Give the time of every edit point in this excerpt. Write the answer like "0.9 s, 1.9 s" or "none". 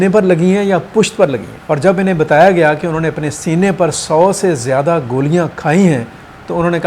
1.5 s